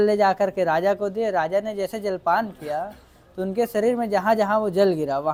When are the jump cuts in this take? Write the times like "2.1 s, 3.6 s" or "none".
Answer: none